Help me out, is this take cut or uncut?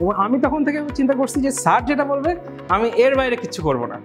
uncut